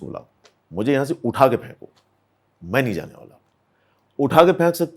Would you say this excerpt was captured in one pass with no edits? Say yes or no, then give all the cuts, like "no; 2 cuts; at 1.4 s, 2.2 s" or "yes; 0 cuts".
yes; 0 cuts